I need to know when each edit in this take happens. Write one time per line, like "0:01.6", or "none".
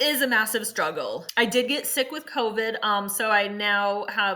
0:01.2